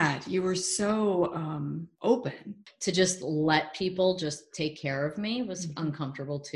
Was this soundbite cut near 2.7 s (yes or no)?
yes